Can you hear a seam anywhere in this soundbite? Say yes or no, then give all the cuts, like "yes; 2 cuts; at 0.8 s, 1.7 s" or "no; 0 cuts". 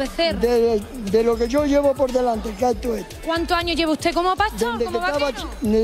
no; 0 cuts